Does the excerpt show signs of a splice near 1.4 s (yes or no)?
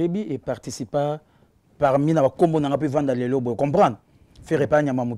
no